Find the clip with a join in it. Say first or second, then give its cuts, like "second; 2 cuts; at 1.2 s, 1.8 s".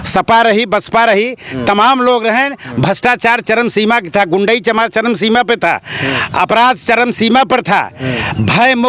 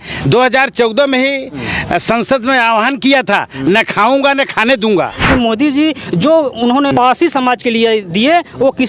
second; 2 cuts; at 5.2 s, 6.9 s